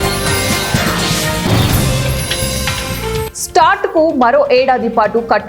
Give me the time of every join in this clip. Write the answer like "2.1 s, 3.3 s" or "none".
3.3 s